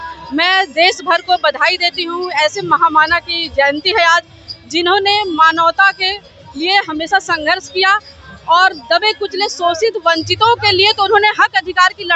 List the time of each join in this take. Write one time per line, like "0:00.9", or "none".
none